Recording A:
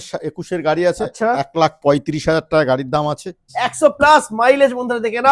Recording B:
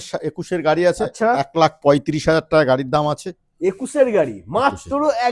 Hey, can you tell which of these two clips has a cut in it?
A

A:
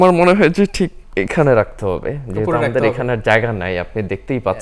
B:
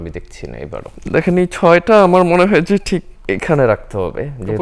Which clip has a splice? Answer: B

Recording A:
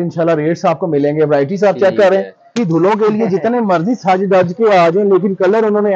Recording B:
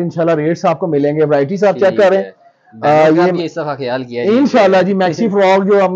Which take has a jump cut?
A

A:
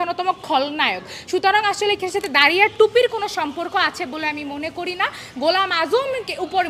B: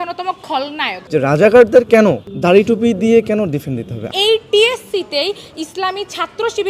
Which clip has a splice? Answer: B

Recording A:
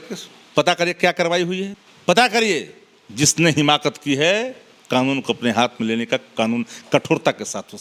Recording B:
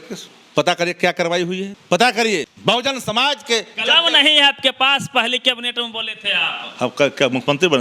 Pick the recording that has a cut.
B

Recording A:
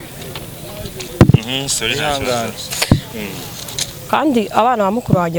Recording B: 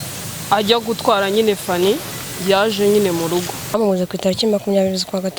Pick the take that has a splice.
B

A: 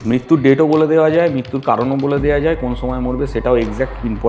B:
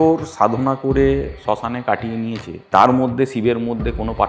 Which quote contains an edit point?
B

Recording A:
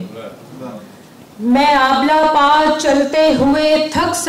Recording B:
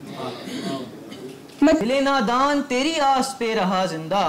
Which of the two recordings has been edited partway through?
B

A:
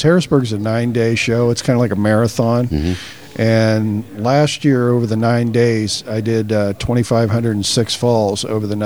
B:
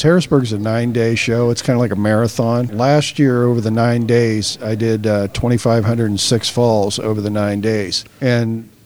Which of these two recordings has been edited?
B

